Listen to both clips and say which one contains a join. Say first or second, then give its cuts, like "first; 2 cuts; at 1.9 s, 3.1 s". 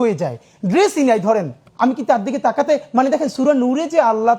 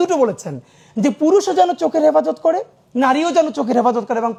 first; 1 cut; at 1.6 s